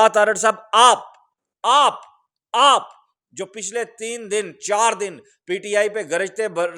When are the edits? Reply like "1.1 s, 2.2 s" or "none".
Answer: none